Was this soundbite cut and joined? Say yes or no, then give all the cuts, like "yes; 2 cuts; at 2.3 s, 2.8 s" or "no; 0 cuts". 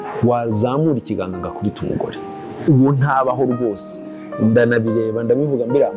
no; 0 cuts